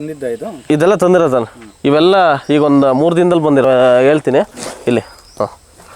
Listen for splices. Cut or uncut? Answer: cut